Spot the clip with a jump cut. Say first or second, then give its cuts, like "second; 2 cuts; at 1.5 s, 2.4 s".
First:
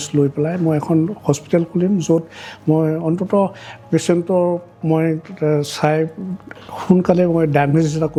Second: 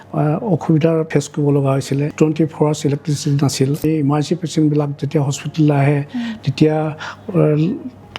second; 3 cuts; at 1.1 s, 2.1 s, 3.8 s